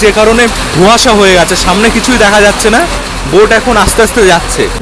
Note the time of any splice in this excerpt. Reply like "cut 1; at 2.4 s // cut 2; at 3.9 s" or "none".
none

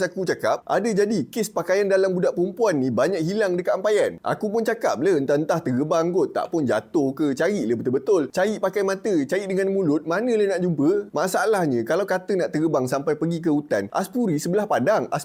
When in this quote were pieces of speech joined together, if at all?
none

